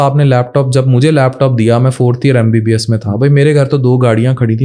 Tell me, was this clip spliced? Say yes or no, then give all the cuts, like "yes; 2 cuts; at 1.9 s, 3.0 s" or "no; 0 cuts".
no; 0 cuts